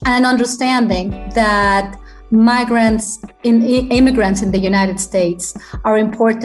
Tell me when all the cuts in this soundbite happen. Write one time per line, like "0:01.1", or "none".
none